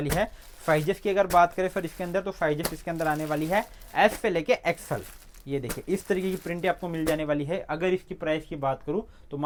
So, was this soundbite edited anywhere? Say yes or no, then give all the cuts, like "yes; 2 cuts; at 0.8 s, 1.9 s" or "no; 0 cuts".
no; 0 cuts